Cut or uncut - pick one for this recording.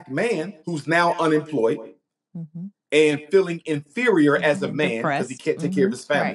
uncut